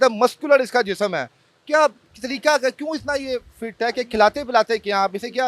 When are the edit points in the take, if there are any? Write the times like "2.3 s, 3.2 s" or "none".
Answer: none